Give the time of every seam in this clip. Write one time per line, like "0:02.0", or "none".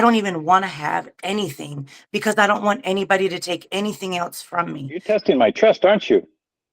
0:04.9